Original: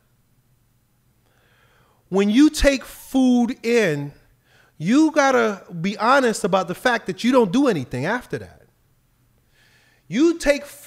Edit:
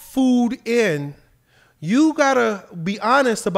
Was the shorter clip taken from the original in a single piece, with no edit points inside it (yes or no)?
yes